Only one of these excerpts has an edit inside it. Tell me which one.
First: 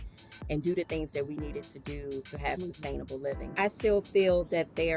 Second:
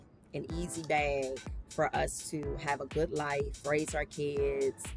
first; 1 cut; at 3.5 s

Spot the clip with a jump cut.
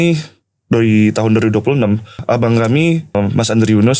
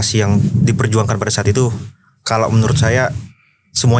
first; 2 cuts; at 2.2 s, 3.1 s

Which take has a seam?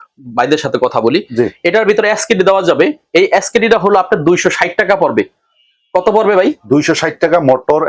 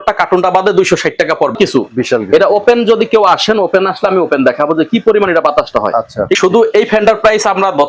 second; 2 cuts; at 1.5 s, 6.4 s

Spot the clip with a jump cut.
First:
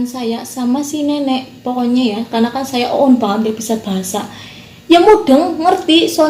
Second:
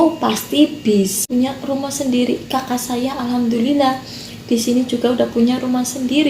second; 1 cut; at 1.2 s

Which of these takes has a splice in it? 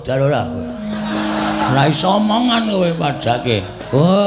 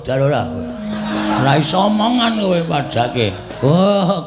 second; 1 cut; at 1.3 s

